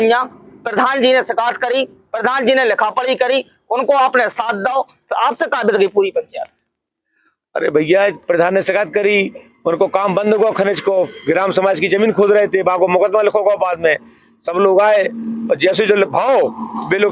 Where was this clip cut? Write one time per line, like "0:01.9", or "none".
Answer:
none